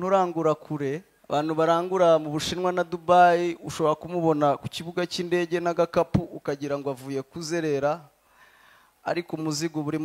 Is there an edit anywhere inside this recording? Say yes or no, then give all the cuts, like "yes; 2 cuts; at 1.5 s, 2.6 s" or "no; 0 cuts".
yes; 1 cut; at 1.1 s